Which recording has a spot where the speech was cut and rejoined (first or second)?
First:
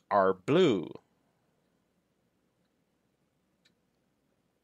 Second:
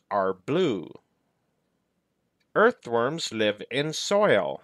second